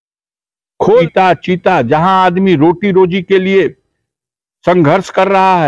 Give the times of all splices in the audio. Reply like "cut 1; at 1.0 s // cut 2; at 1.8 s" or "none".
cut 1; at 1.1 s